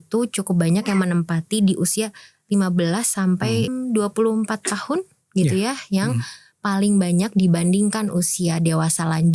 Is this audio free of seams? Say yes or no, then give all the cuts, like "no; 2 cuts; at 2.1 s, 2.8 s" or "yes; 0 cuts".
no; 1 cut; at 3.7 s